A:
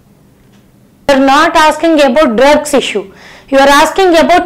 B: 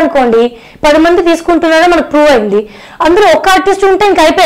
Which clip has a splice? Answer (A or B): A